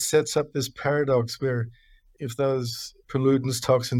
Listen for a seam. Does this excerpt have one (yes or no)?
yes